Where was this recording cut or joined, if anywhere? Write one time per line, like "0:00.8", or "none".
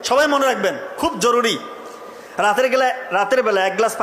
none